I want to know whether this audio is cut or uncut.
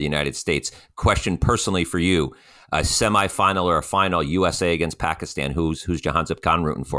uncut